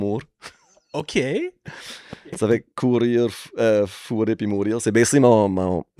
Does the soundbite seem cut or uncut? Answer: uncut